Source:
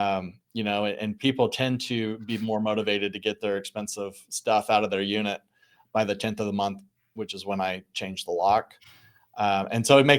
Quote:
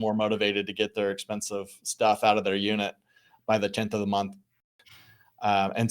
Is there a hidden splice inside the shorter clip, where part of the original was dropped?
yes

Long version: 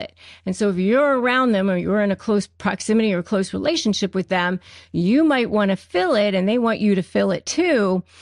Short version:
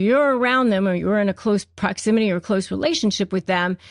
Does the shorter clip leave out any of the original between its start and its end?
no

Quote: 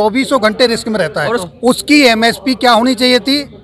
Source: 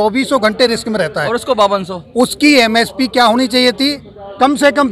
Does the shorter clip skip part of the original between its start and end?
yes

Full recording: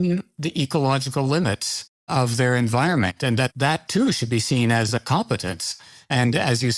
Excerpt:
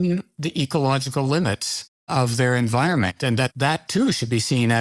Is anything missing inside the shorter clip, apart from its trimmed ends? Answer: no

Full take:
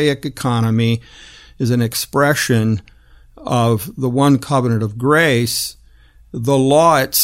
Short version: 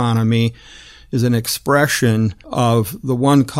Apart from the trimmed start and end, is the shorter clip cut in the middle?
yes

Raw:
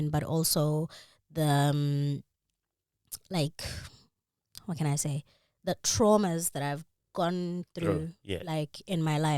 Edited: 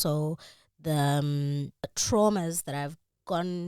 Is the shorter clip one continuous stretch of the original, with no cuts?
no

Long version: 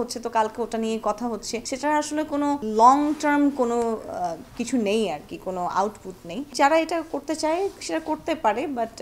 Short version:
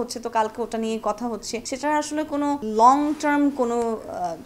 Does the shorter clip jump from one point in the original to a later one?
no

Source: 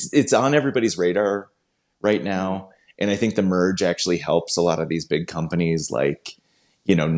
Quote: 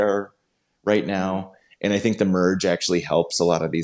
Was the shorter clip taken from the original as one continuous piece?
yes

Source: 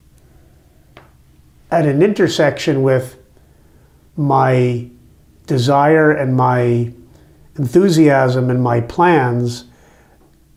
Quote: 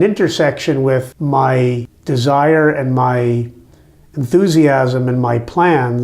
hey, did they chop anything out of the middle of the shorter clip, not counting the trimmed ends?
yes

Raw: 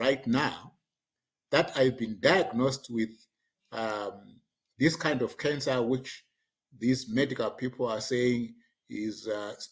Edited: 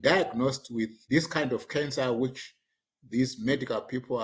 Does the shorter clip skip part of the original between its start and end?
yes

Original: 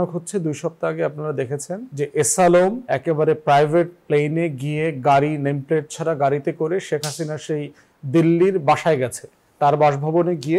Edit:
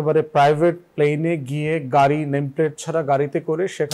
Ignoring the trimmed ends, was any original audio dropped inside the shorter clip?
no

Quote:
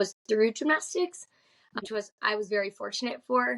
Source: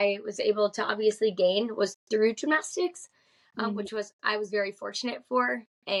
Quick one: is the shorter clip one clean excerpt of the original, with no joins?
no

